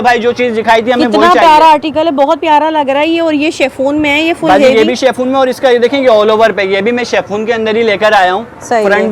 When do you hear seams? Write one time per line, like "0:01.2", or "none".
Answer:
none